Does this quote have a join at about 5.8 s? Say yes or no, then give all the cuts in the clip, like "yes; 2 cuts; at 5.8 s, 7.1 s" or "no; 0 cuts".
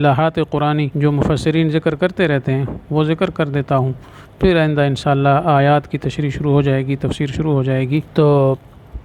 no; 2 cuts; at 0.9 s, 8.1 s